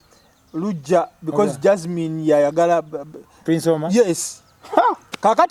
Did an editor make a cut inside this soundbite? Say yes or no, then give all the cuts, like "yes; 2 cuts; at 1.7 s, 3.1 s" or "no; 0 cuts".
no; 0 cuts